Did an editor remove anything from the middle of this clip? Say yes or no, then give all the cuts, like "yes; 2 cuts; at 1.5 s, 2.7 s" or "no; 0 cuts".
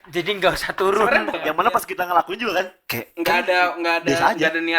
yes; 1 cut; at 1.3 s